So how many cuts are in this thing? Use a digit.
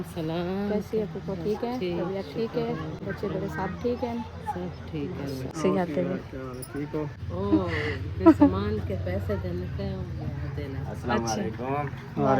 2